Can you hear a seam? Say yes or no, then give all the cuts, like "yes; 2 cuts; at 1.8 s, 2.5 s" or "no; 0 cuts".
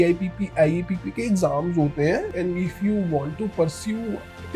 yes; 1 cut; at 2.3 s